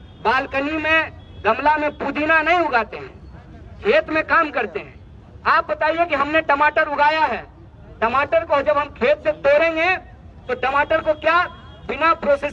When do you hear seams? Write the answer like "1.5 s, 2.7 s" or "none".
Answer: none

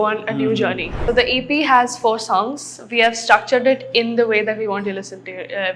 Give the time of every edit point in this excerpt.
1.1 s

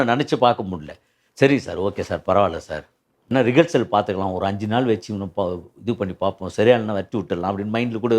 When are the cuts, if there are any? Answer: 3.3 s

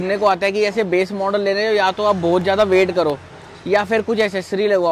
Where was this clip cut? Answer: none

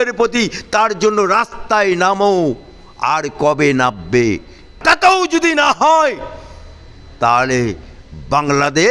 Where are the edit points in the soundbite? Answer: 4.6 s

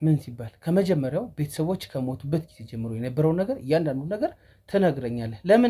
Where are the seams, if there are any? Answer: none

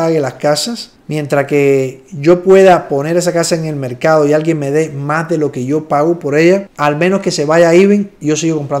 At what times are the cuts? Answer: none

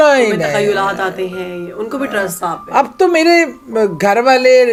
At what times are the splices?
none

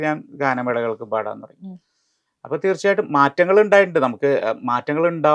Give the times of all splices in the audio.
none

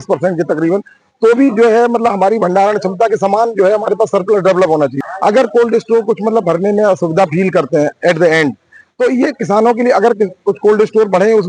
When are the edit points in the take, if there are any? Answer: 5.1 s

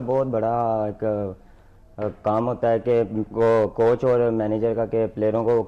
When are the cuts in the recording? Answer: none

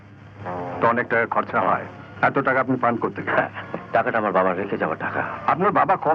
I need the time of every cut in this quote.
2.0 s, 3.7 s, 5.3 s

